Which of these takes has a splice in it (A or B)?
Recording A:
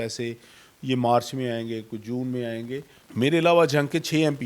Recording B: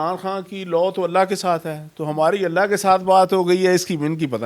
A